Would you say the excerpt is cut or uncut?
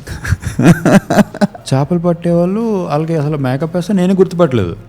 cut